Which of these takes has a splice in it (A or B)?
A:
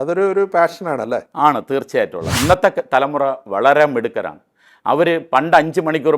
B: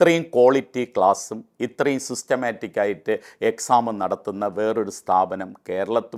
A